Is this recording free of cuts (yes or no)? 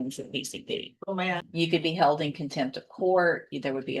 no